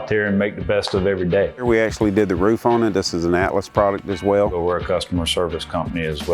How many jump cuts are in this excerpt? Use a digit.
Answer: 2